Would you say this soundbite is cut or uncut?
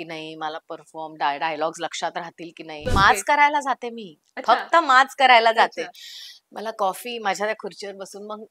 cut